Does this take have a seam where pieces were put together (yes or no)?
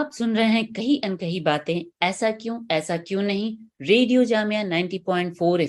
no